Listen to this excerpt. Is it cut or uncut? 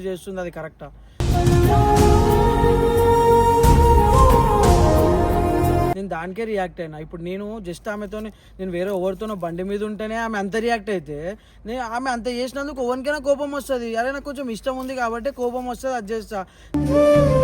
uncut